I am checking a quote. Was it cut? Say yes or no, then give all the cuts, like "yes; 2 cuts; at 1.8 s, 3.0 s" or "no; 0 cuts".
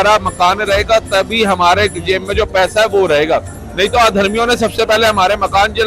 no; 0 cuts